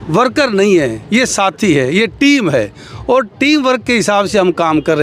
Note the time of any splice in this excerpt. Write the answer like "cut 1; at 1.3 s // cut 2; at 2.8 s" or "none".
none